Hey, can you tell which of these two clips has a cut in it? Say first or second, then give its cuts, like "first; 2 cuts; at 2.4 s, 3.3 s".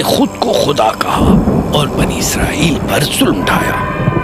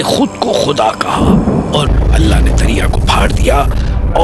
second; 1 cut; at 1.9 s